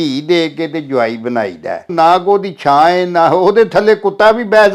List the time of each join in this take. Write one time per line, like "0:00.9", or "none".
0:01.9